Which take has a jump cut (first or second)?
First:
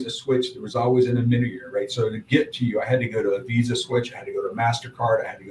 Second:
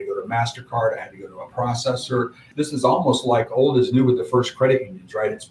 second